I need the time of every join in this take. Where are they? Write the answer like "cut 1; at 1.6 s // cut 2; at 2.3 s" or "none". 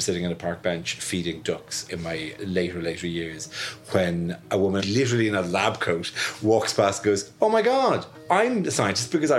cut 1; at 1.9 s // cut 2; at 4.8 s